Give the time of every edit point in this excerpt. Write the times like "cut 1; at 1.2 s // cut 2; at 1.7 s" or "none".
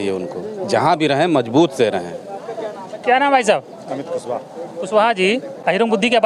none